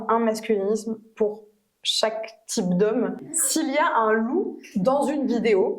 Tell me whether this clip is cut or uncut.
cut